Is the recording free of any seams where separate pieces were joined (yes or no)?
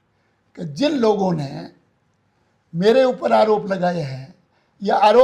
yes